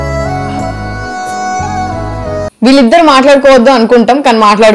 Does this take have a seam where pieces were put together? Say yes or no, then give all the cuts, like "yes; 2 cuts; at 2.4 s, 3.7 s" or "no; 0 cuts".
no; 0 cuts